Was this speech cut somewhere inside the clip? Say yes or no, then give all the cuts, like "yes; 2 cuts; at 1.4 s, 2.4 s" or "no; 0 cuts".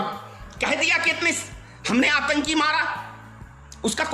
no; 0 cuts